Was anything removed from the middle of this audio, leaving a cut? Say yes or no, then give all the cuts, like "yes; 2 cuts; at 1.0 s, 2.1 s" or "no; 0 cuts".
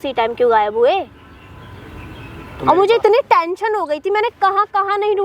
no; 0 cuts